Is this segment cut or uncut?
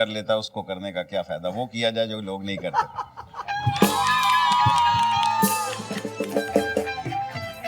uncut